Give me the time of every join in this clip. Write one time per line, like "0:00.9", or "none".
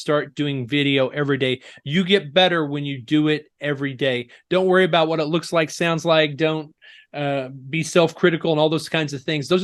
none